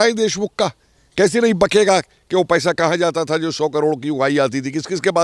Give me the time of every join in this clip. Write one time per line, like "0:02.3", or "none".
none